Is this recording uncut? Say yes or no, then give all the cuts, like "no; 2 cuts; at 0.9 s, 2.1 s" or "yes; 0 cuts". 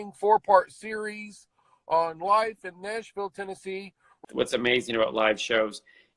no; 1 cut; at 4.1 s